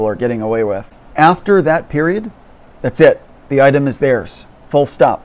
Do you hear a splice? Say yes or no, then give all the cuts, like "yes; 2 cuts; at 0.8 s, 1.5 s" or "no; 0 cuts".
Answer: yes; 1 cut; at 1.0 s